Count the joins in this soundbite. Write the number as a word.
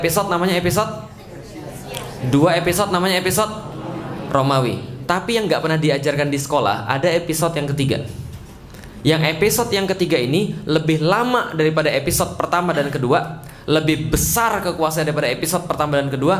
zero